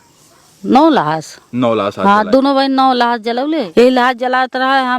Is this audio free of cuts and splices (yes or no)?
no